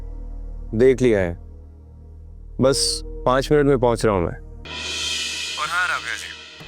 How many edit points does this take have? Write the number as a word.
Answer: one